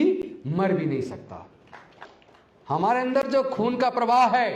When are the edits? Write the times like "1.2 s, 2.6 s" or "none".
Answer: 2.1 s